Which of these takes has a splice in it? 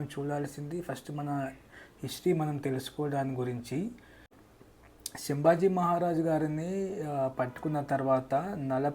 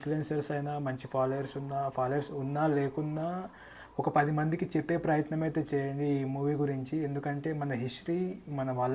first; 1 cut; at 4.3 s

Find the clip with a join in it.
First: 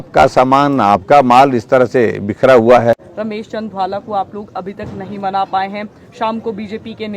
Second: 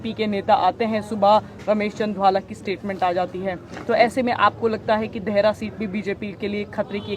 first; 1 cut; at 2.9 s

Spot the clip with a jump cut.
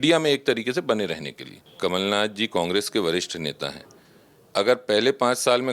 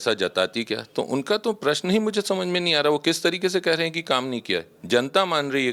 first; 1 cut; at 1.7 s

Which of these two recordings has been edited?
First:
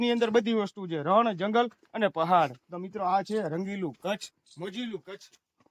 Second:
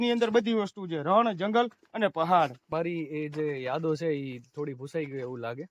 second; 1 cut; at 2.7 s

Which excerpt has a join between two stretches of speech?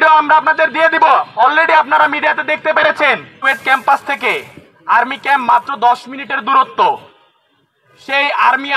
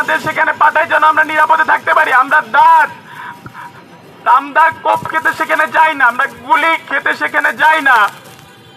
first; 1 cut; at 3.3 s

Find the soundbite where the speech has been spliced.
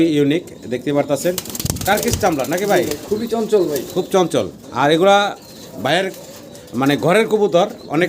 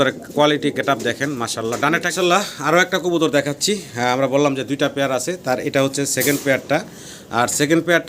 second; 1 cut; at 2.1 s

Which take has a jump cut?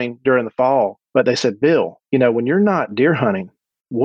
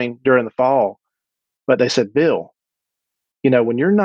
first; 2 cuts; at 1.0 s, 2.0 s

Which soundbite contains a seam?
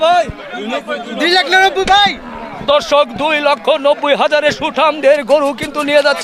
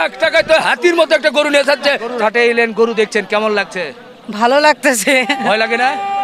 second; 1 cut; at 2.0 s

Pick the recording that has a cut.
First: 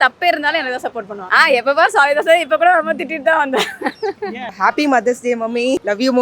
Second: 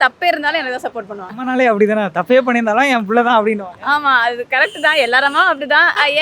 first; 2 cuts; at 1.2 s, 4.5 s

